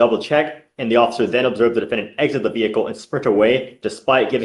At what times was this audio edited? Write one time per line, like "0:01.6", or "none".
none